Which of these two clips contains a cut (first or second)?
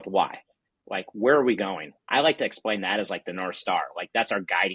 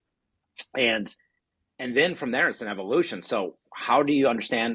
first